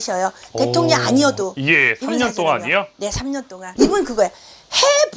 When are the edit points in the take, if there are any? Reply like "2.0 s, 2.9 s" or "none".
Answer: 3.7 s